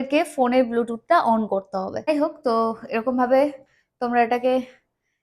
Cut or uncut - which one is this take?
cut